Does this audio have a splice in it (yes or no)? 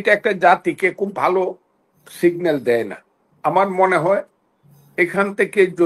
no